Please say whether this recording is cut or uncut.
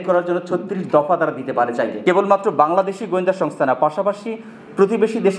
cut